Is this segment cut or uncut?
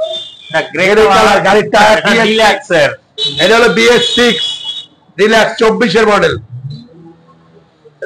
cut